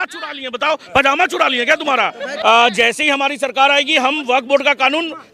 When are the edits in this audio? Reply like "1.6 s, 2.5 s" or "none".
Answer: 2.4 s